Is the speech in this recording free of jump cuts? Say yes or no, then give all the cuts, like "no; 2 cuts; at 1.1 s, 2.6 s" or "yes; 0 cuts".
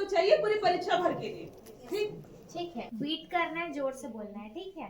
no; 1 cut; at 2.8 s